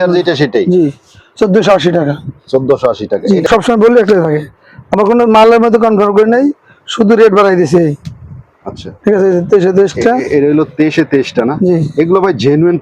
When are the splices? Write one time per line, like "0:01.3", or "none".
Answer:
0:03.5